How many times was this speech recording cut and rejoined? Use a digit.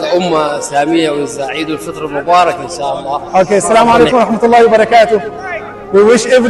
1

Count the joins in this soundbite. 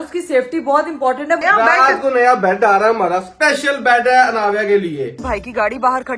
2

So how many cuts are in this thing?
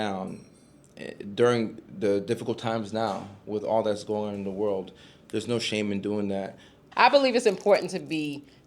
1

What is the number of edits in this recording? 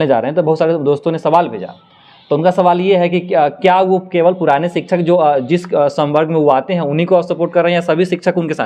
0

